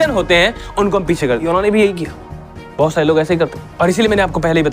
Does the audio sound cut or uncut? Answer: cut